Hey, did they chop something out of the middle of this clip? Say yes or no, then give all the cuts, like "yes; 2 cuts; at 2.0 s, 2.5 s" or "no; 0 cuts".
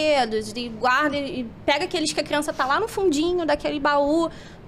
no; 0 cuts